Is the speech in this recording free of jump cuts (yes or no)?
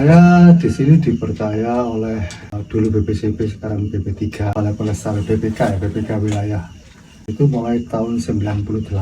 no